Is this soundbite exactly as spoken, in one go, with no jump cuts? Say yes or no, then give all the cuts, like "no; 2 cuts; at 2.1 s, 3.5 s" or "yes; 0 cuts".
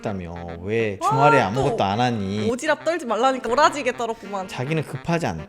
no; 2 cuts; at 3.4 s, 4.5 s